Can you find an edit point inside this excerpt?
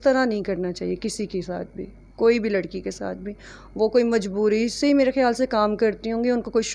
no; 0 cuts

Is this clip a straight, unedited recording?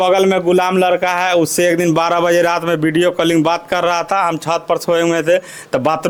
yes; 0 cuts

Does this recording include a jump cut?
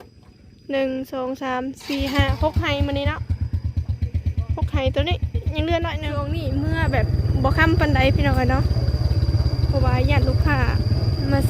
yes; 1 cut; at 6.2 s

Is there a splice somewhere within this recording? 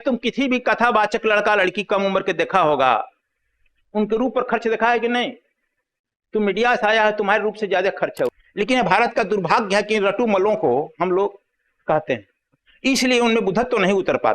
yes; 1 cut; at 8.4 s

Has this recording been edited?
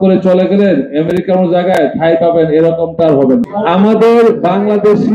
yes; 1 cut; at 3.5 s

